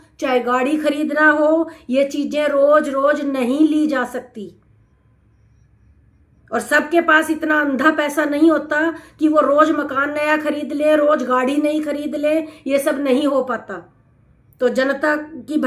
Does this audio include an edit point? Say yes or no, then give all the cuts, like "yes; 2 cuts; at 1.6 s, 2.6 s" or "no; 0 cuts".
no; 0 cuts